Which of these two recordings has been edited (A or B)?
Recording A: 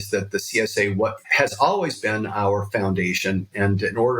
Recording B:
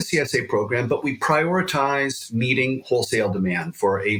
A